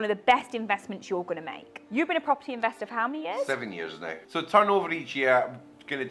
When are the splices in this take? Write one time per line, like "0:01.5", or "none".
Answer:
0:01.8
0:04.2